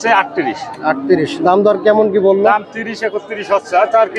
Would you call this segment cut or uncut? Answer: uncut